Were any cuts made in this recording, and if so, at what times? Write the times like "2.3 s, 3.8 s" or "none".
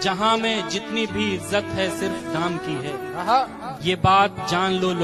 none